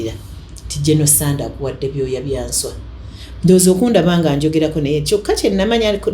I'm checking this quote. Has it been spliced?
no; 0 cuts

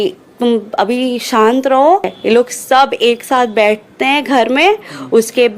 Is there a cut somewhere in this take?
yes; 1 cut; at 2.1 s

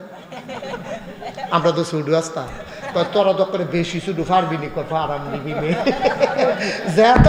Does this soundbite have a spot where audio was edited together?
no; 0 cuts

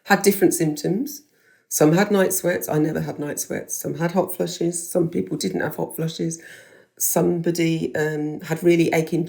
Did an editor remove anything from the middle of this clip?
no; 0 cuts

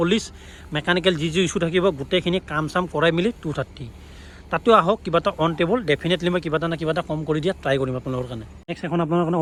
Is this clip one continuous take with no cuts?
yes; 0 cuts

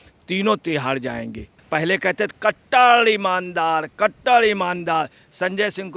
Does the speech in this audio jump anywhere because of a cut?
yes; 1 cut; at 1.5 s

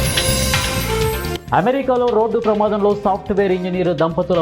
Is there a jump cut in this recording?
yes; 1 cut; at 1.3 s

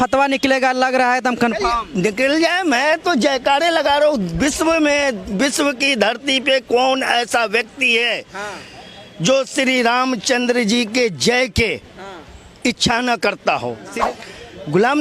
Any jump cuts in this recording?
yes; 1 cut; at 13.8 s

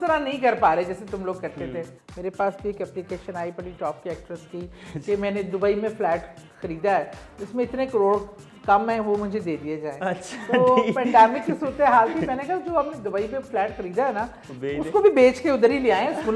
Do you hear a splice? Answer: yes; 1 cut; at 2.0 s

